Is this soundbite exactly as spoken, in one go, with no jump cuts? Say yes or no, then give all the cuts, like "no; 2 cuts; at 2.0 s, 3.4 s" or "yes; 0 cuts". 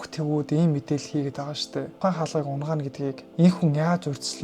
no; 1 cut; at 1.9 s